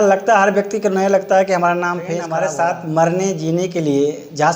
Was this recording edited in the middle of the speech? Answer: yes; 1 cut; at 2.2 s

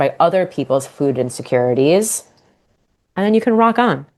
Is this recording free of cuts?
yes; 0 cuts

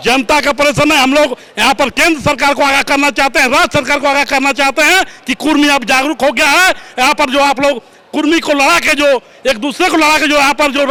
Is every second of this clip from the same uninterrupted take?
yes; 0 cuts

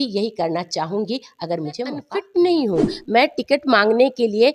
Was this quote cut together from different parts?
yes; 1 cut; at 2.2 s

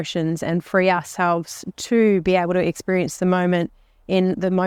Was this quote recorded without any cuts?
yes; 0 cuts

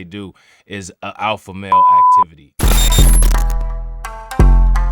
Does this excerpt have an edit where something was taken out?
yes; 1 cut; at 1.7 s

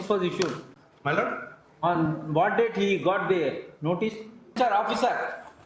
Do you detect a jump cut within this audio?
yes; 1 cut; at 4.5 s

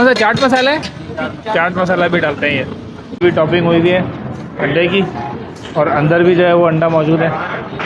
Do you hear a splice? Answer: yes; 1 cut; at 3.2 s

